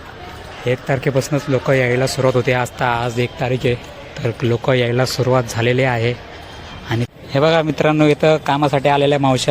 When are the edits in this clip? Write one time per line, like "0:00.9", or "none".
0:07.1